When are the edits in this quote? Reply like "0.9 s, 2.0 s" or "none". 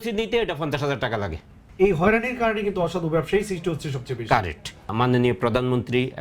1.6 s, 4.9 s